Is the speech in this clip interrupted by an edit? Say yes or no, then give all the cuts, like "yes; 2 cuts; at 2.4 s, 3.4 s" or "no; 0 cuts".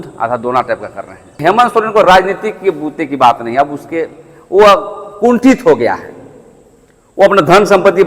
yes; 1 cut; at 1.4 s